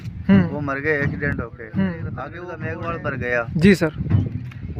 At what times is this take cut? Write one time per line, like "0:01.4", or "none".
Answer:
0:02.4